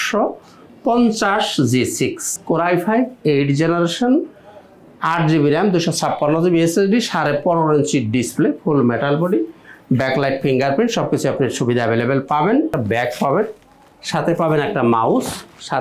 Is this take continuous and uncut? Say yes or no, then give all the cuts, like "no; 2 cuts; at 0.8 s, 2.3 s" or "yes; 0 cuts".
no; 2 cuts; at 2.3 s, 12.8 s